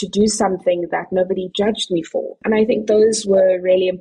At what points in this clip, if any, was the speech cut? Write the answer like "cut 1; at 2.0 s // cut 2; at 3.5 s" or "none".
cut 1; at 2.4 s